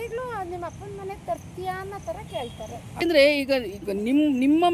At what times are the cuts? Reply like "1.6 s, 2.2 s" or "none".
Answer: 3.0 s